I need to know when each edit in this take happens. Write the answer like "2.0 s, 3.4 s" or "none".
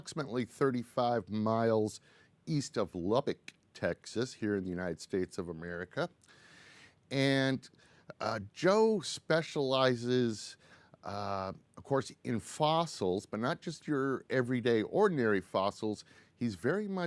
12.9 s